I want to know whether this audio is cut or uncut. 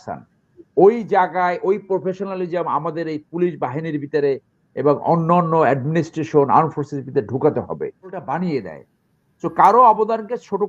cut